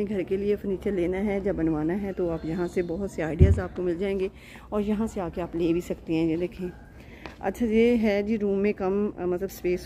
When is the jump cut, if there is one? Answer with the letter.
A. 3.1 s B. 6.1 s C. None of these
C